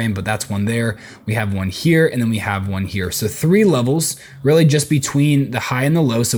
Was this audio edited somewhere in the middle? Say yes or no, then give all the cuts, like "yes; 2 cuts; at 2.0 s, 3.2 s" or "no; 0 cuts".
no; 0 cuts